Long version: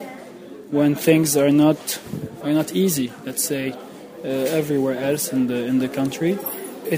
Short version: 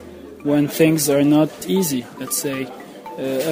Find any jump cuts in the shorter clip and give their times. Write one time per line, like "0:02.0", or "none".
0:01.6